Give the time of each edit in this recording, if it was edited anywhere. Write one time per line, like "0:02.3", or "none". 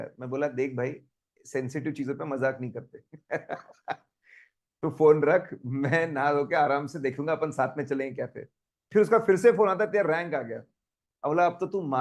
none